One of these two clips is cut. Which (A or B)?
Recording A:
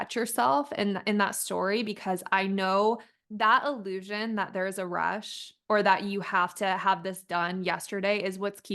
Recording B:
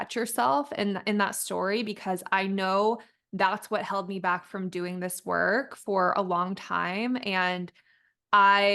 A